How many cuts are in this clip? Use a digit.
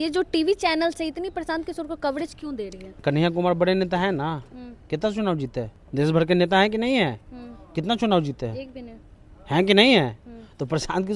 2